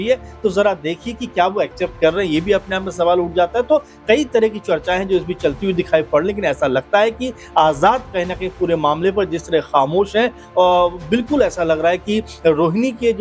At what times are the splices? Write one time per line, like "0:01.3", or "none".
none